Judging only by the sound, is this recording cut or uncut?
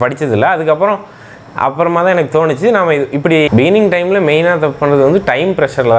cut